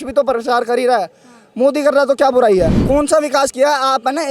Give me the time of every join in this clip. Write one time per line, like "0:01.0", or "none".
0:02.8